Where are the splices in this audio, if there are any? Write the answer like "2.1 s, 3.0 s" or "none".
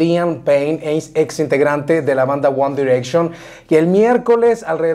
none